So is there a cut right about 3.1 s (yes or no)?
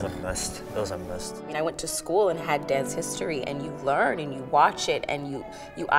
no